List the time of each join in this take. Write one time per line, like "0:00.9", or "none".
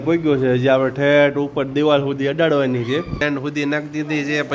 0:03.2